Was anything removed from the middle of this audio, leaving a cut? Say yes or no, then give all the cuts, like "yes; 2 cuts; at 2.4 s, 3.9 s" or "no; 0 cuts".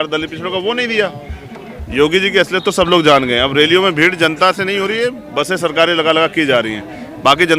no; 0 cuts